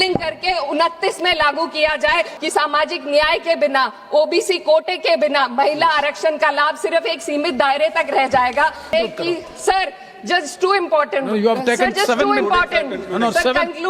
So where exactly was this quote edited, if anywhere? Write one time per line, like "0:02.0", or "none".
0:02.3
0:08.9

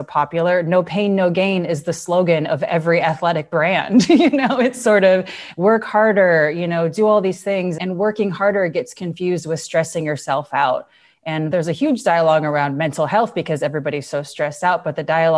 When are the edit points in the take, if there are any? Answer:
0:07.8
0:11.5

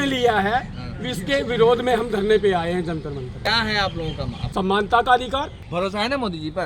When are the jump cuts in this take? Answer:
0:03.5
0:04.4
0:05.6

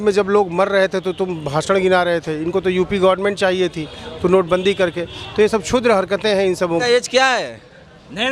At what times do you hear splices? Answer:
0:06.8

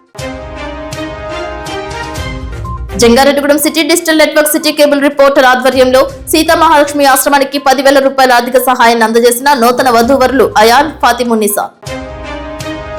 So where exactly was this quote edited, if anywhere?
none

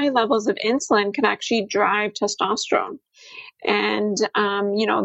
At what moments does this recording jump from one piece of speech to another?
none

